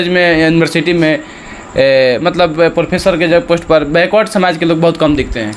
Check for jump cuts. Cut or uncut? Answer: uncut